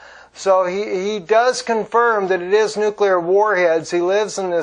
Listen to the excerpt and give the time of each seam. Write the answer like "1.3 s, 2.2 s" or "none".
none